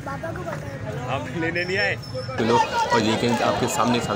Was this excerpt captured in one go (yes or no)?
no